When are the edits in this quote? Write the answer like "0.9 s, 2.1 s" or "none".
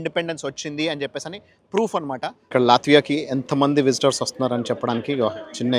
2.4 s